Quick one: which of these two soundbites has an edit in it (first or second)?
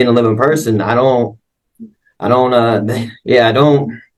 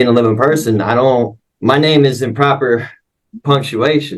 second